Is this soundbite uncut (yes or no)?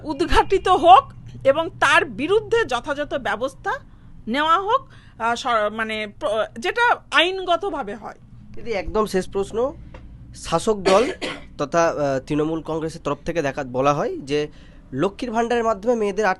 yes